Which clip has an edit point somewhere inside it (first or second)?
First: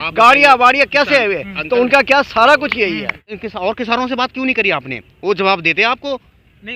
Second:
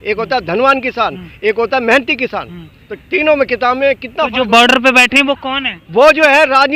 first